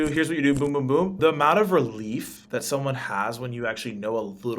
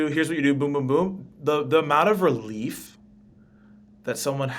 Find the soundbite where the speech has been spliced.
first; 2 cuts; at 1.2 s, 2.4 s

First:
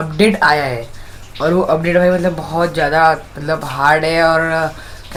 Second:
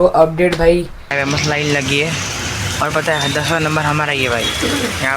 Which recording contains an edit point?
second; 1 cut; at 1.0 s

